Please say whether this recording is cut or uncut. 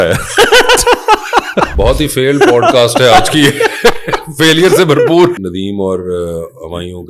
cut